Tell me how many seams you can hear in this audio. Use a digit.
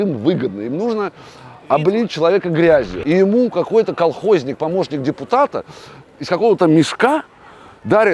1